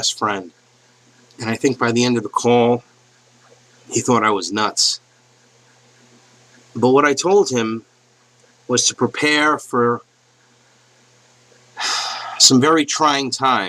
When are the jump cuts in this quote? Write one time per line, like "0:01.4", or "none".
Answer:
0:11.5